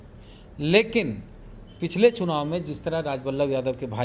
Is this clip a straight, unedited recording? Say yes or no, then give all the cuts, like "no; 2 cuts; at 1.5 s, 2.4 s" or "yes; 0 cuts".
yes; 0 cuts